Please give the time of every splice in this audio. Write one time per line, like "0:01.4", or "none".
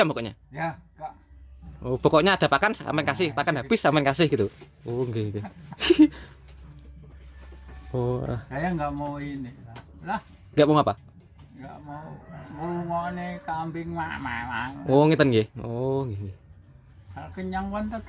none